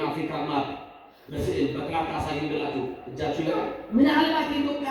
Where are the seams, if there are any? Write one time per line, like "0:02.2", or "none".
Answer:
0:03.7